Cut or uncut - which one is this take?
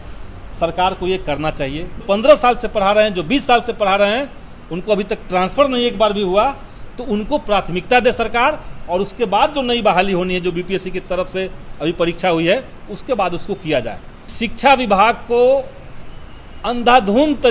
cut